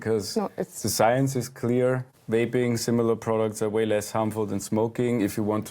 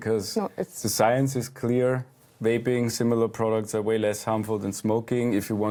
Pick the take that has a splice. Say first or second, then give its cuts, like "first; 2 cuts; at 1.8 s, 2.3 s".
first; 1 cut; at 2.1 s